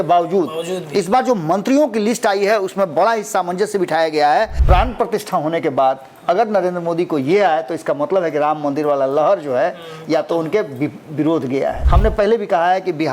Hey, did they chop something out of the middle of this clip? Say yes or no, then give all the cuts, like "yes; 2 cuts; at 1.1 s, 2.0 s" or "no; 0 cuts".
yes; 2 cuts; at 4.6 s, 11.8 s